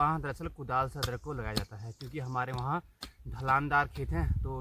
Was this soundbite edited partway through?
no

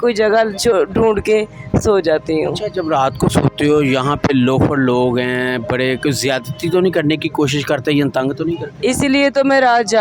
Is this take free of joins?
yes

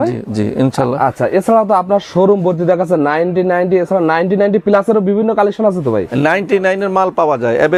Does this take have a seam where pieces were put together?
no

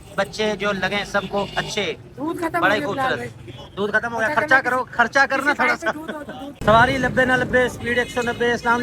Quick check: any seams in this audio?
yes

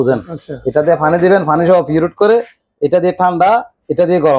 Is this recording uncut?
yes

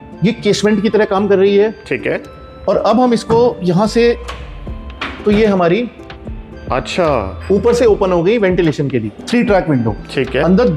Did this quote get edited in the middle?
yes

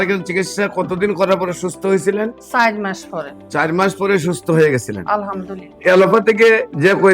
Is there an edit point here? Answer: yes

